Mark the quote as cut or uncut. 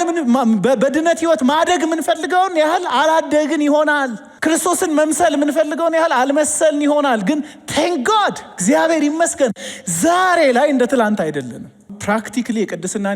cut